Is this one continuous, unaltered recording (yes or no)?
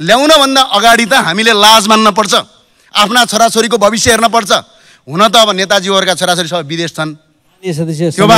yes